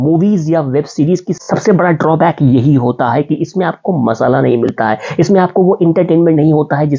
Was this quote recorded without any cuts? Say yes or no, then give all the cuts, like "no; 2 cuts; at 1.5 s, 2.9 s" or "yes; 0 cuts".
yes; 0 cuts